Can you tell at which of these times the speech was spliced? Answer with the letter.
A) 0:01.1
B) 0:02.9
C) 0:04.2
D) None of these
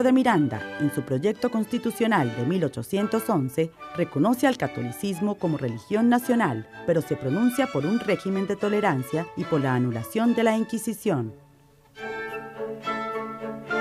D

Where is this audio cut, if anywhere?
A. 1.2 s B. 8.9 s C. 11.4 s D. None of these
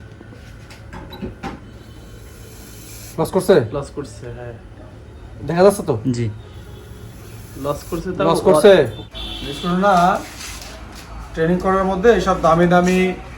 B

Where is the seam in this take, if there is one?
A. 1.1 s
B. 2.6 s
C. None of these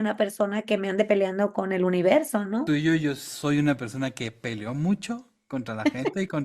B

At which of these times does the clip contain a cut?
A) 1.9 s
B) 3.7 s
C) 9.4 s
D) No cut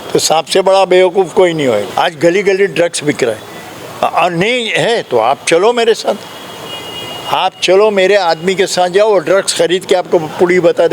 A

